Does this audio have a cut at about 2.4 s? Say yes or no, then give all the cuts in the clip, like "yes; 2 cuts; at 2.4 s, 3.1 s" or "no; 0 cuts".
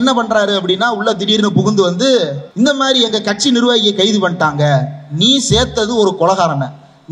yes; 1 cut; at 2.4 s